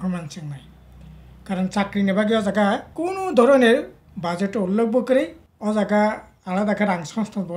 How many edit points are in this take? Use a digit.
2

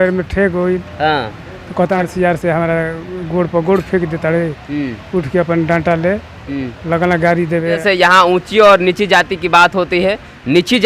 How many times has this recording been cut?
2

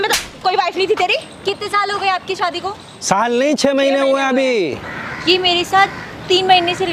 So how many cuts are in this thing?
0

